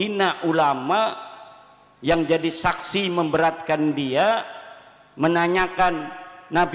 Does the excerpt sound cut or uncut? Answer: uncut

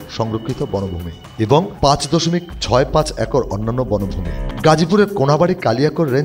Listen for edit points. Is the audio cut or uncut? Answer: cut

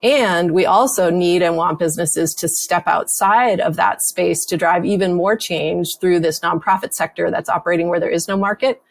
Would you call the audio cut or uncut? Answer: uncut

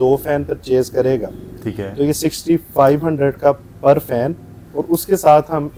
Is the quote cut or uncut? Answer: uncut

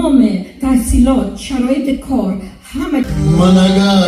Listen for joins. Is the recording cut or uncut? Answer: cut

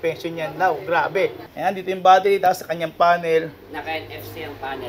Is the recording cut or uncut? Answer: cut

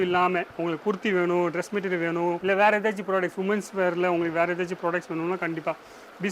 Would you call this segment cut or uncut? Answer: uncut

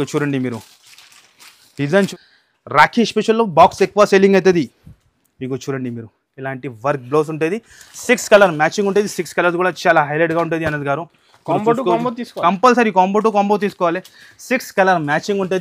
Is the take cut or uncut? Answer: cut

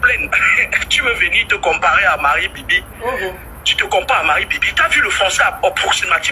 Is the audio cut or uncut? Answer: uncut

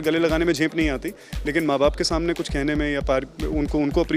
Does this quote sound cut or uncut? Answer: uncut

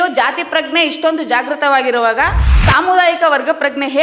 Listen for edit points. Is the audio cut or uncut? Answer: uncut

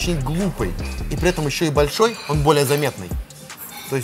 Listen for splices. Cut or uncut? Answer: uncut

